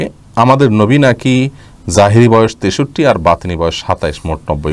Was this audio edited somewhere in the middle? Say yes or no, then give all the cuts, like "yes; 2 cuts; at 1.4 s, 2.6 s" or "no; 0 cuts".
no; 0 cuts